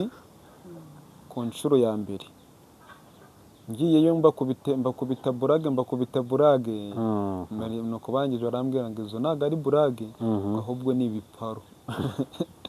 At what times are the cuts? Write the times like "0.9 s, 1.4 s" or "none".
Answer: none